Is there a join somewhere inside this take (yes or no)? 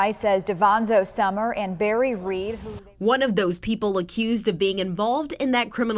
yes